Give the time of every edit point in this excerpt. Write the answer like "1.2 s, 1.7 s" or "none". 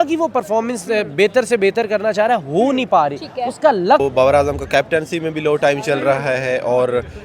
4.0 s